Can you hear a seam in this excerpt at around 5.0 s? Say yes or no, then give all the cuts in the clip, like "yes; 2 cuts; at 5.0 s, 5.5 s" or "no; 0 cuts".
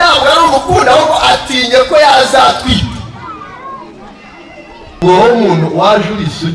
yes; 1 cut; at 5.0 s